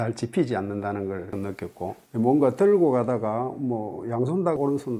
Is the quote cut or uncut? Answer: uncut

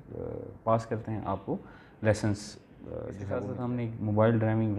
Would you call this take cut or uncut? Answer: cut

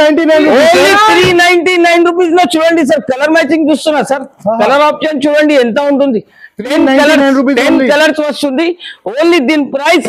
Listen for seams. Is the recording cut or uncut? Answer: uncut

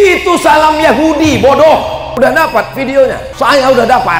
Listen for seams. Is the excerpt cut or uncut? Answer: cut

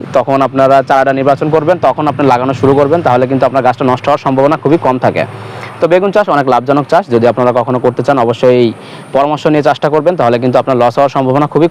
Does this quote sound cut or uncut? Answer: uncut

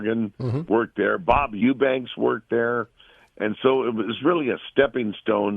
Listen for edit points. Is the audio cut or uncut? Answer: cut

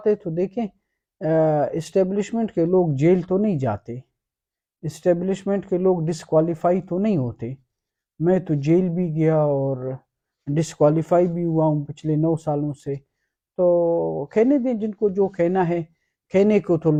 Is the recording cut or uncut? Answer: uncut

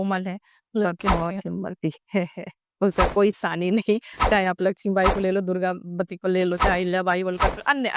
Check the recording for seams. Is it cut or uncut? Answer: uncut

